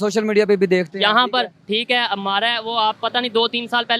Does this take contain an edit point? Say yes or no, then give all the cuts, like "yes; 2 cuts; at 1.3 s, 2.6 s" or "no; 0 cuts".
no; 0 cuts